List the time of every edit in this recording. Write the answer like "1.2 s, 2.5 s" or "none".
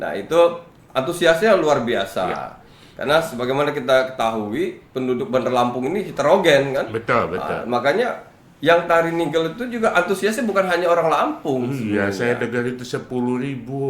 none